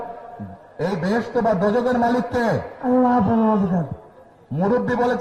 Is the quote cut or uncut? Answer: uncut